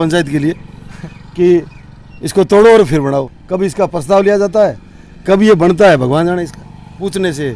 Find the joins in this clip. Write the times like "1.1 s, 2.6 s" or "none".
none